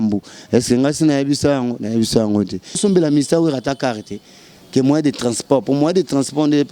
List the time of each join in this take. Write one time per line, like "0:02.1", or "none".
0:02.8